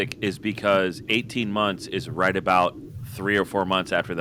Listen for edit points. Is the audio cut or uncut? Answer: uncut